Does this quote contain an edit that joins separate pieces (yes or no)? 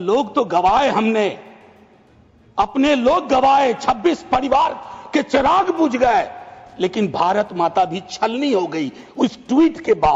no